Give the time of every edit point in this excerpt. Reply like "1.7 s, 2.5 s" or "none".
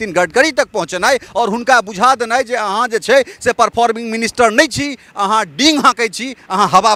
none